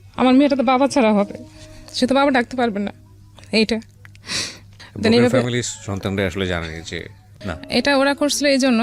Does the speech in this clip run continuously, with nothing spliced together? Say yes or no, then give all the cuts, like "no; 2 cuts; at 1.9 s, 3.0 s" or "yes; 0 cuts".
no; 1 cut; at 7.5 s